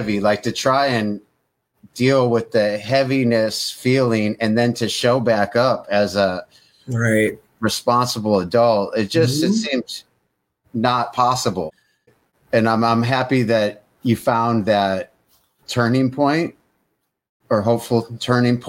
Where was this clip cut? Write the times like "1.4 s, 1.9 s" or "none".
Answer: none